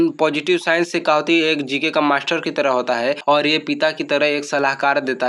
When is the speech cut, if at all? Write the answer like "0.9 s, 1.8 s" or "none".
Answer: 3.2 s